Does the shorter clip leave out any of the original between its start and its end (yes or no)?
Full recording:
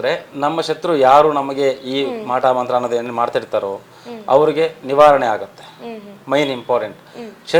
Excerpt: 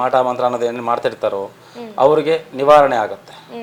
no